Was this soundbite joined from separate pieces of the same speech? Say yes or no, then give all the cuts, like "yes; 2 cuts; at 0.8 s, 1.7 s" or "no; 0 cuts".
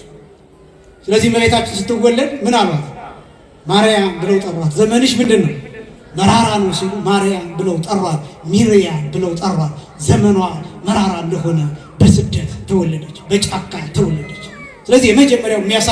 no; 0 cuts